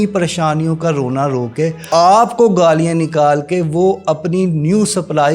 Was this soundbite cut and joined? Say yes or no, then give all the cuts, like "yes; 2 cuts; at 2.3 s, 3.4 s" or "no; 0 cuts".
yes; 1 cut; at 1.8 s